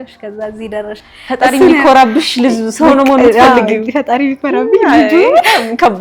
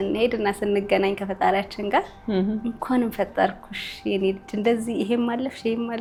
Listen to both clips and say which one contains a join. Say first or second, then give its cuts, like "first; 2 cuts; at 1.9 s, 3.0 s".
first; 1 cut; at 1.1 s